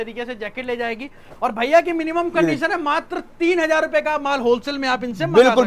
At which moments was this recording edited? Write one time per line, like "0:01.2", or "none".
none